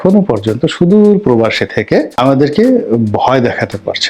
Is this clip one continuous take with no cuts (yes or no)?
no